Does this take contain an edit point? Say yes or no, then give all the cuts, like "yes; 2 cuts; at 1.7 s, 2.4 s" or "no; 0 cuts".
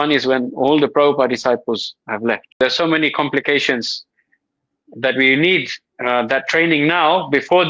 yes; 1 cut; at 2.6 s